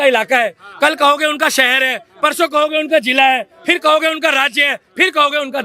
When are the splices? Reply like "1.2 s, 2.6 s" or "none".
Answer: none